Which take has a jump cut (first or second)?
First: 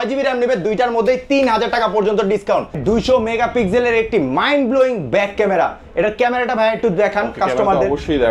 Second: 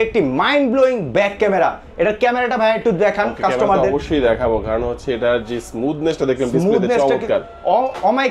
first